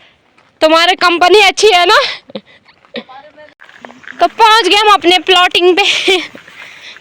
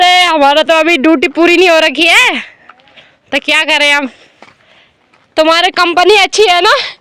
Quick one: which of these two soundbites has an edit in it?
first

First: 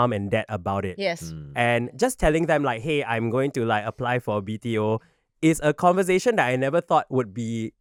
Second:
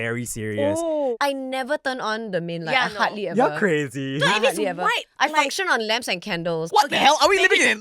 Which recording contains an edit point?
second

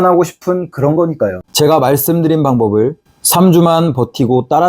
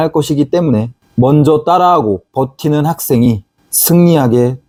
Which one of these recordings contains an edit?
first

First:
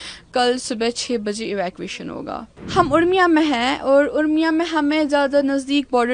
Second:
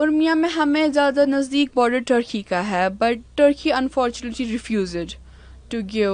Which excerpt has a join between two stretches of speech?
first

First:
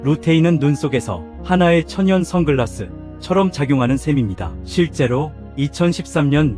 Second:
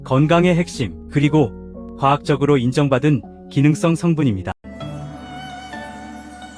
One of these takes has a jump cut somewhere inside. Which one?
second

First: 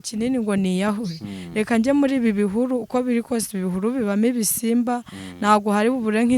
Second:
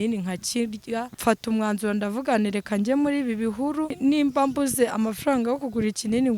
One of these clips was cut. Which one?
second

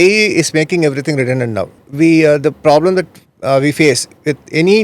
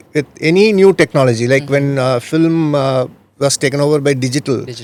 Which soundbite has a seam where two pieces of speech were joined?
first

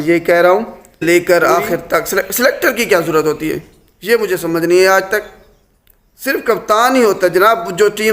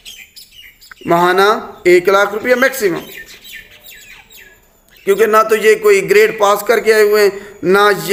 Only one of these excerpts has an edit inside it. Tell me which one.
first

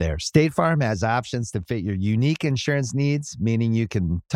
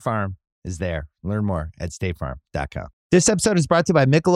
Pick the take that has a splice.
second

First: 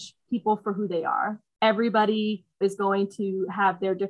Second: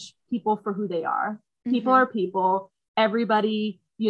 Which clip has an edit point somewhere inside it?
first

